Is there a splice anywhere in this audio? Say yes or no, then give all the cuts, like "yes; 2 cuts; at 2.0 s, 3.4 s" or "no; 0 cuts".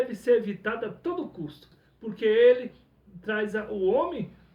yes; 1 cut; at 1.8 s